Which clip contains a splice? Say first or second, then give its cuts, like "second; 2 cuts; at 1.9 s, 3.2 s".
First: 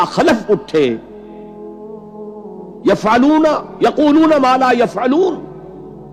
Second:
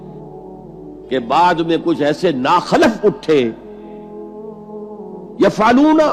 second; 1 cut; at 0.9 s